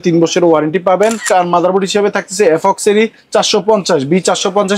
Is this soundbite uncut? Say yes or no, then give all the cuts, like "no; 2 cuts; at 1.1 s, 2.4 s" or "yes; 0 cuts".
no; 1 cut; at 1.2 s